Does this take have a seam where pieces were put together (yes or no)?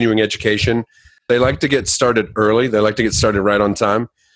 yes